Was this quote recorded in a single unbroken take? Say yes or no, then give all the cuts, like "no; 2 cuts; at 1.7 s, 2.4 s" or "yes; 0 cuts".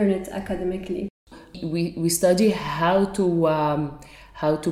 no; 1 cut; at 1.5 s